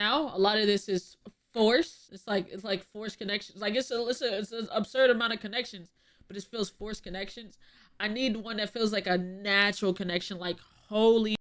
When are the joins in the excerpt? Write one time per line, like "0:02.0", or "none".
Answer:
0:02.1